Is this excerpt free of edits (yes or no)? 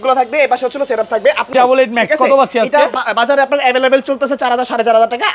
no